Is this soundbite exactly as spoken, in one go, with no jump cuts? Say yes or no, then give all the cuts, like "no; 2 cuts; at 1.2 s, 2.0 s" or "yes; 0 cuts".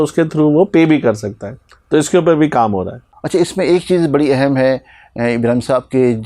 yes; 0 cuts